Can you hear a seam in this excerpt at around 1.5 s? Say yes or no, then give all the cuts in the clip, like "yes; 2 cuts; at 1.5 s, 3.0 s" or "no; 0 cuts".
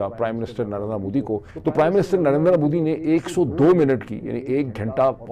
yes; 1 cut; at 1.5 s